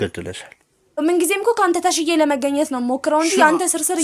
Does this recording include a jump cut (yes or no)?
yes